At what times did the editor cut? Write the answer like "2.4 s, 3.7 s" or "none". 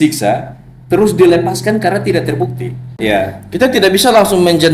2.9 s